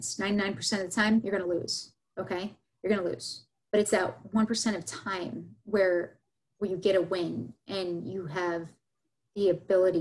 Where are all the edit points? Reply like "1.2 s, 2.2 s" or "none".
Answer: none

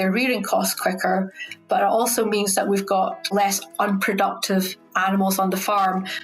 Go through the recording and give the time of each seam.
3.3 s

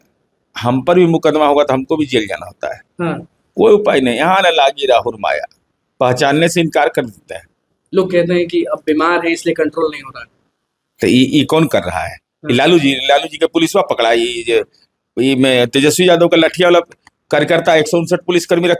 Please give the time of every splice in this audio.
none

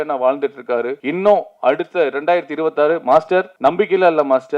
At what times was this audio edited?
1.0 s, 3.5 s

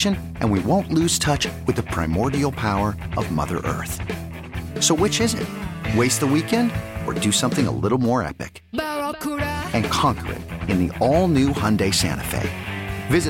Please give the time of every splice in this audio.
none

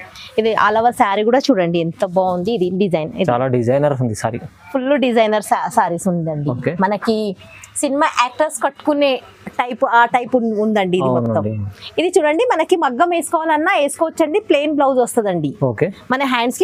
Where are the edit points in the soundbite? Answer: none

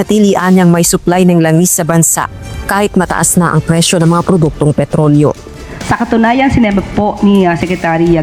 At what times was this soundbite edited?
none

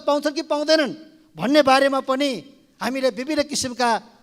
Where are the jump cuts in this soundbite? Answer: none

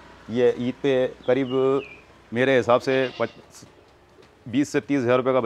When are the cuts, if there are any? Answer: none

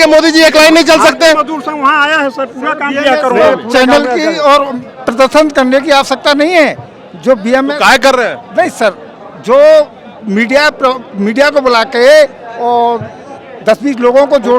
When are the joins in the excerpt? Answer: none

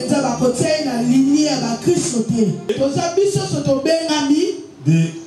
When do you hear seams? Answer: 2.7 s

